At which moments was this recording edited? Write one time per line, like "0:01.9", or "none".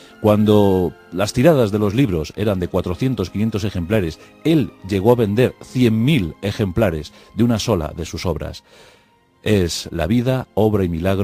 0:01.5